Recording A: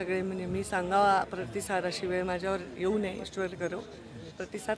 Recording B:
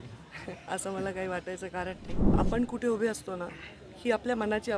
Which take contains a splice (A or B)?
B